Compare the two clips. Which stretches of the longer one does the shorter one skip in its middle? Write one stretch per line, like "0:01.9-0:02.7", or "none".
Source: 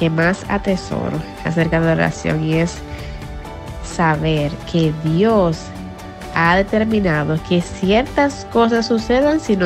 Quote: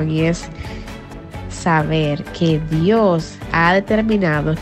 0:05.7-0:06.2